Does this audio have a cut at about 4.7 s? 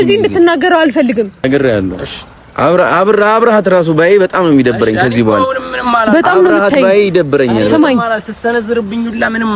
no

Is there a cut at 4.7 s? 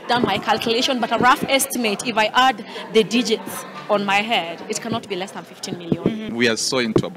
no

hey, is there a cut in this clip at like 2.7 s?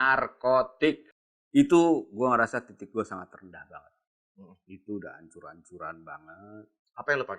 no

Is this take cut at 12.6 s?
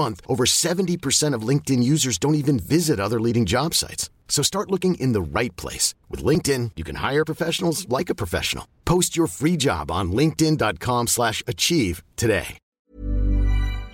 yes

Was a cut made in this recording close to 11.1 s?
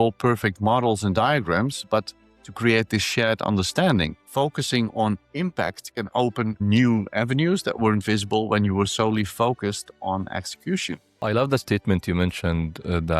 yes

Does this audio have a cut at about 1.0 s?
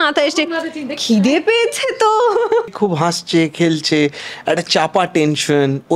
no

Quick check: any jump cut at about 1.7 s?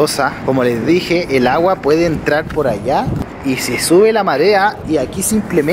no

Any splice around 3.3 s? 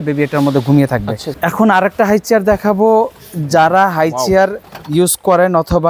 no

